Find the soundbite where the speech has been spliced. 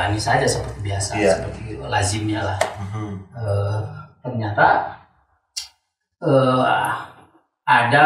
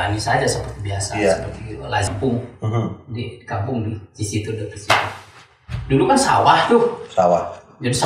second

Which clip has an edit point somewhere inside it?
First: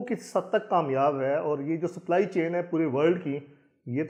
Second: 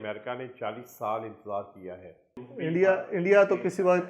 second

